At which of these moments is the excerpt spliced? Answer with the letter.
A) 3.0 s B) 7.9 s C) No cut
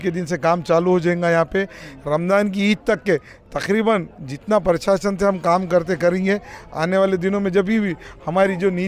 C